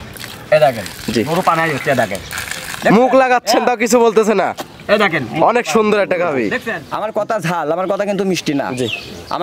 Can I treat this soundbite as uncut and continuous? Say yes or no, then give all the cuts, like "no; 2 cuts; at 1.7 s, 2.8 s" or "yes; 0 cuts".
no; 1 cut; at 6.7 s